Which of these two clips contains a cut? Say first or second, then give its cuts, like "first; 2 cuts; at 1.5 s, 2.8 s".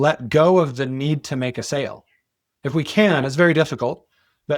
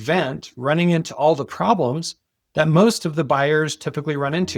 first; 1 cut; at 2.4 s